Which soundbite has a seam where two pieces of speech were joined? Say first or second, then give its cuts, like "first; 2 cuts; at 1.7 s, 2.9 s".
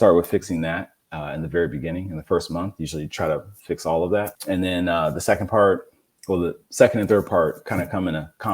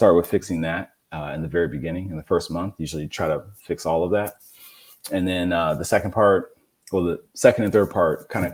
first; 1 cut; at 4.4 s